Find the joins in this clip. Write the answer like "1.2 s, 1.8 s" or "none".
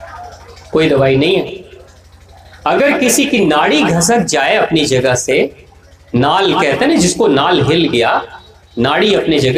none